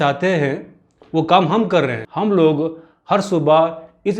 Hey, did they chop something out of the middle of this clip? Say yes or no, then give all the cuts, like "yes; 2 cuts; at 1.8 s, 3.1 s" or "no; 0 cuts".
yes; 1 cut; at 2.0 s